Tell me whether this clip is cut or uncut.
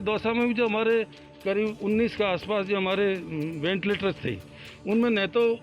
uncut